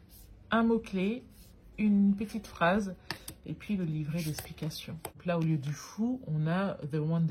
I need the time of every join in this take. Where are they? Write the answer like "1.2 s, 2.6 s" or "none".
5.2 s